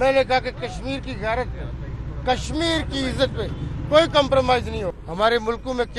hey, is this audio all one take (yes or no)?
no